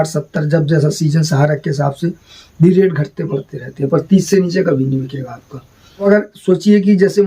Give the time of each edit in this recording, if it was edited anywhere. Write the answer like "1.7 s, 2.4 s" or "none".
6.0 s